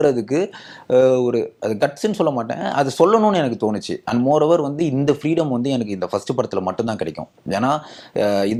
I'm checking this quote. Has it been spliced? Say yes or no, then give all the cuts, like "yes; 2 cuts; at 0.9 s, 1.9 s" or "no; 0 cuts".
no; 0 cuts